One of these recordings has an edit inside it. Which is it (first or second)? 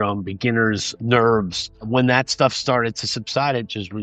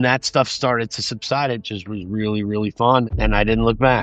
second